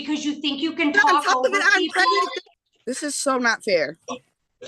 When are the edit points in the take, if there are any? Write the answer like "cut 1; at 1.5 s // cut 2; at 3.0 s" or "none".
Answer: cut 1; at 2.4 s